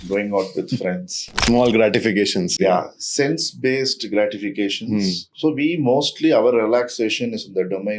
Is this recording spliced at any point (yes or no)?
yes